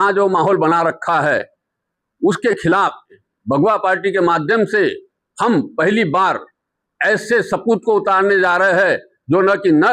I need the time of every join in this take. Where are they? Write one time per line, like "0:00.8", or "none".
0:03.2